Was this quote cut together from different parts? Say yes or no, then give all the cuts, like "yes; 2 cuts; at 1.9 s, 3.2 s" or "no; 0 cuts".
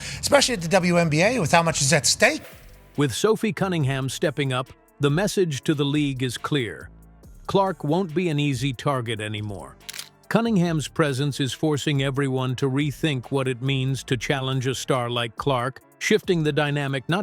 no; 0 cuts